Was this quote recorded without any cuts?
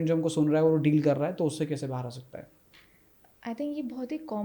yes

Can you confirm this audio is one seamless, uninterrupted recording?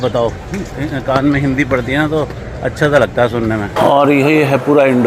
no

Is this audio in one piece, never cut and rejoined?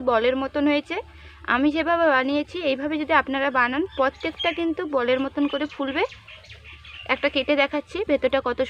yes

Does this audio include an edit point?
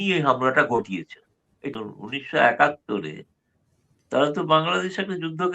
yes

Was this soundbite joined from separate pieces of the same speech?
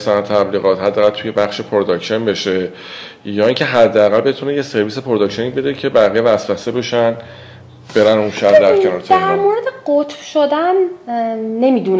no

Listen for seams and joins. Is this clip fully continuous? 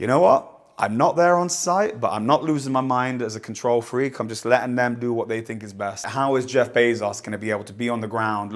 no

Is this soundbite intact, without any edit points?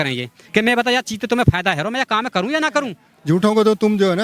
no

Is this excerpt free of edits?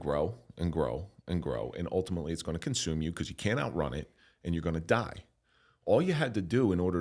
yes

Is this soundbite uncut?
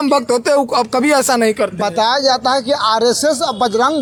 yes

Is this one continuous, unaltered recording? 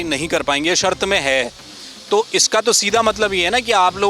yes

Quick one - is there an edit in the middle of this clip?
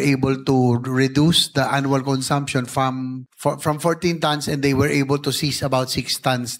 yes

